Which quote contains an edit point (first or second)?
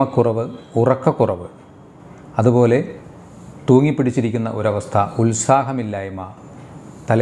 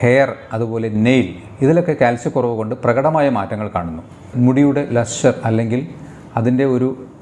second